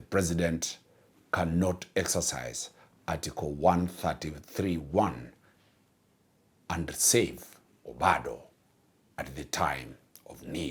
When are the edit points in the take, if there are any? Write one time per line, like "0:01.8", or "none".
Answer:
none